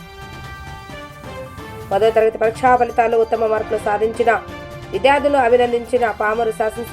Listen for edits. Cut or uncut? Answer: cut